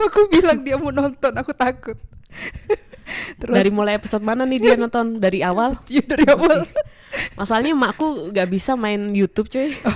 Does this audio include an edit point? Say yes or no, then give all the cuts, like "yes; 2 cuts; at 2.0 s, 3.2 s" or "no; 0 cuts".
no; 0 cuts